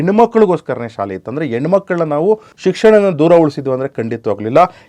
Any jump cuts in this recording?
yes; 1 cut; at 2.5 s

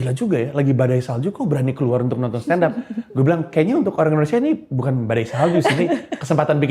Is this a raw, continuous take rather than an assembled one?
yes; 0 cuts

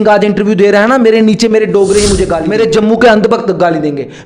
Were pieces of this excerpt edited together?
yes; 1 cut; at 2.4 s

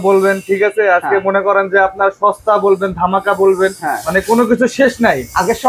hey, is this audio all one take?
yes; 0 cuts

